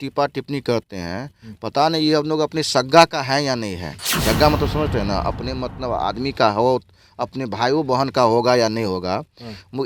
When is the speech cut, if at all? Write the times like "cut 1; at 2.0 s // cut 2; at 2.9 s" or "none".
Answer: none